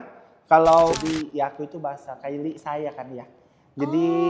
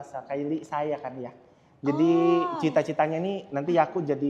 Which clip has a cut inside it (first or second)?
first